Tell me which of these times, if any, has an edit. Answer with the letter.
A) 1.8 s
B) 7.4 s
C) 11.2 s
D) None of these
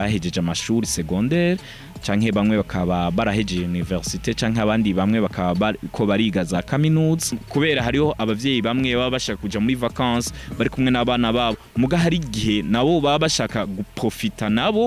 B